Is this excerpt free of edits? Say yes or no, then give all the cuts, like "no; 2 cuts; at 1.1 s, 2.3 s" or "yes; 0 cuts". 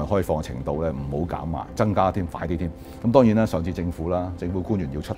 no; 1 cut; at 2.8 s